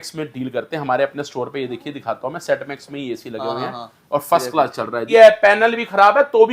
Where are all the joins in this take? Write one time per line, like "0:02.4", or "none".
0:05.0